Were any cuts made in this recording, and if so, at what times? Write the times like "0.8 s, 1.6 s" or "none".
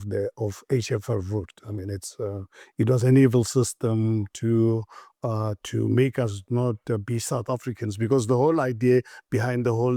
none